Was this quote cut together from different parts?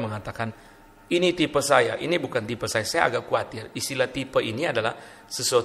no; 0 cuts

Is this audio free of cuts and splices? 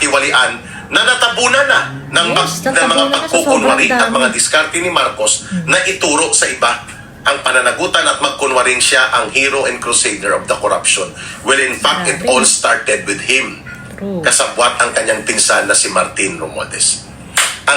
yes; 0 cuts

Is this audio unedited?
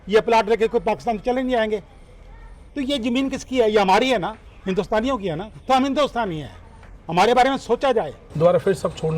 no; 1 cut; at 8.2 s

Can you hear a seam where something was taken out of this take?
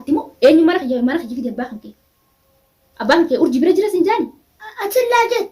no; 0 cuts

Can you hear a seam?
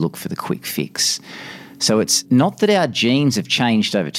yes; 1 cut; at 2.2 s

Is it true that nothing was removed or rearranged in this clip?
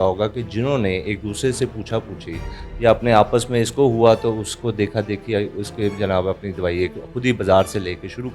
yes; 0 cuts

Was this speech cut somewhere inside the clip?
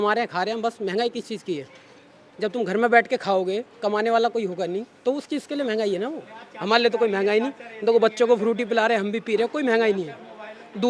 no; 0 cuts

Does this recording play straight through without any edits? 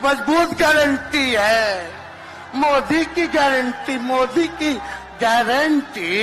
yes; 0 cuts

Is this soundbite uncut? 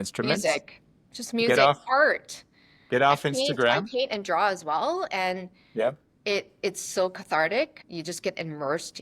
no; 1 cut; at 7.9 s

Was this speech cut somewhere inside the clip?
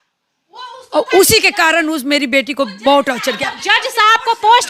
no; 0 cuts

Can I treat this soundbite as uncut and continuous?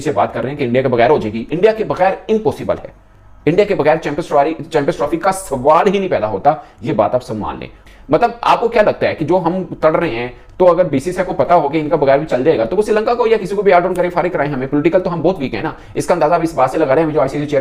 yes; 0 cuts

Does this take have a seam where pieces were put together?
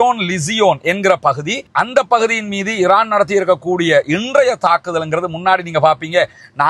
yes; 1 cut; at 1.6 s

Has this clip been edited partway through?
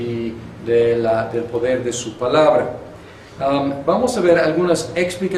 yes; 1 cut; at 3.8 s

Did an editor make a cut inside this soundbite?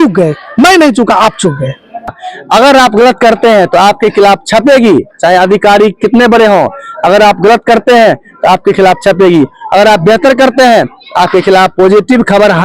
yes; 1 cut; at 2.1 s

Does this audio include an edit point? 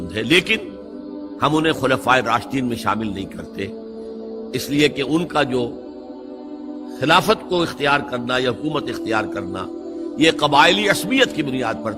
no; 0 cuts

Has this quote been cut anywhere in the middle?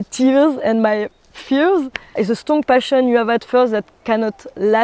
yes; 1 cut; at 2.0 s

